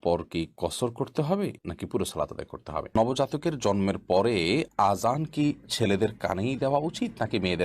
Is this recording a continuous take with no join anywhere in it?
no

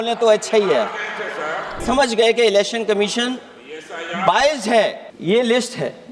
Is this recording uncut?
no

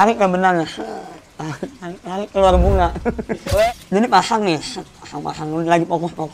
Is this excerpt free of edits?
no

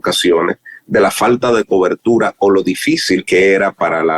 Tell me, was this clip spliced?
yes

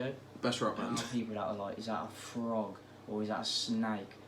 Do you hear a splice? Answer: yes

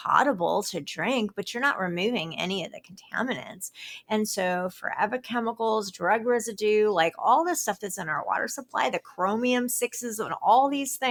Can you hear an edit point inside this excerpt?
no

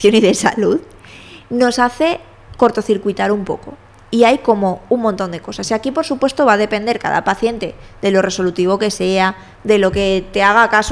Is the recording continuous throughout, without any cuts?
yes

